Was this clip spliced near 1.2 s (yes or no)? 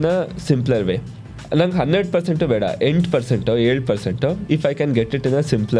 yes